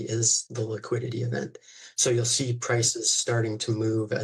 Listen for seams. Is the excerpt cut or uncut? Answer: uncut